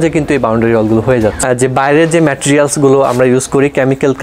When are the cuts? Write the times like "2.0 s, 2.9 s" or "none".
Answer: 1.4 s

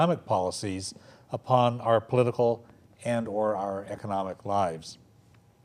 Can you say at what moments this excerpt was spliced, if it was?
none

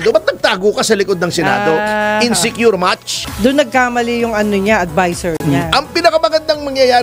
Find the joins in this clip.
3.2 s

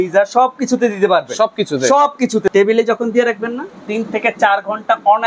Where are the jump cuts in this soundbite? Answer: 2.5 s

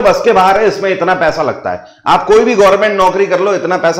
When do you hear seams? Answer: none

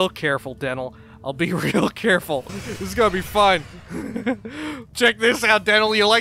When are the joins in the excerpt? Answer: 2.6 s, 4.9 s

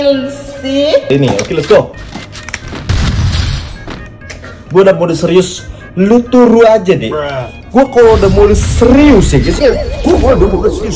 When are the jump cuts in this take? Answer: 1.1 s

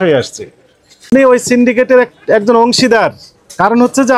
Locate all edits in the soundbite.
1.0 s

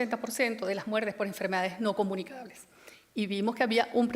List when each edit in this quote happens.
2.0 s

